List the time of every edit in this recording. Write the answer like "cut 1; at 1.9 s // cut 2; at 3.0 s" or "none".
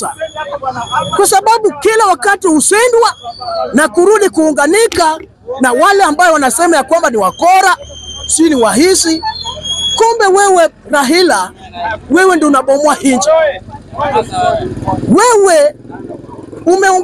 none